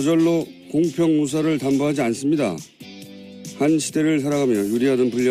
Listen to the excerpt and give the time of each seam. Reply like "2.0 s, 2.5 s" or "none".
1.2 s